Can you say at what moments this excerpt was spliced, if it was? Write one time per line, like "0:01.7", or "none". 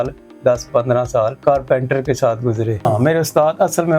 none